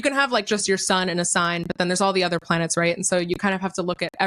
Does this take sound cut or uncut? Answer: uncut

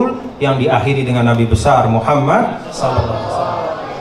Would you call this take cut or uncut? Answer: uncut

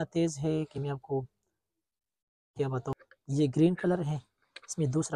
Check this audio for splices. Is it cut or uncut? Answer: cut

